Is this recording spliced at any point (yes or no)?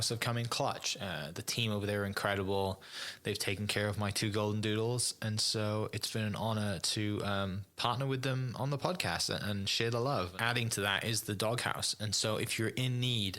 yes